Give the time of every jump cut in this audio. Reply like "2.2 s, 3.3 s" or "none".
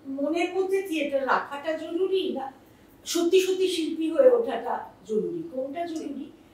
none